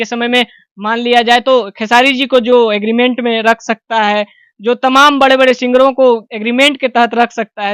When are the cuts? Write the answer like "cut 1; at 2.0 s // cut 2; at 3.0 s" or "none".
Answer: none